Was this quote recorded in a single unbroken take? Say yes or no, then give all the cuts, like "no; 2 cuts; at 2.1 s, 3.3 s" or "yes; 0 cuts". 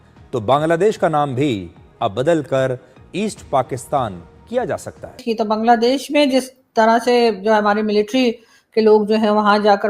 no; 1 cut; at 5.2 s